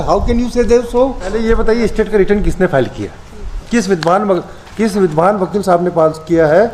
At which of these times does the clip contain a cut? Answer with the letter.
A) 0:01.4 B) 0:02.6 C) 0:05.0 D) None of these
A